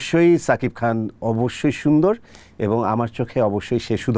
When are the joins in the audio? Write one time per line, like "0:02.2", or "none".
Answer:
none